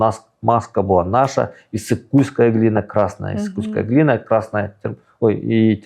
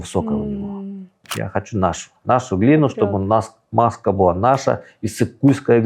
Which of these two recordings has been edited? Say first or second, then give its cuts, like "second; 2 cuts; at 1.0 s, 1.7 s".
second; 1 cut; at 1.2 s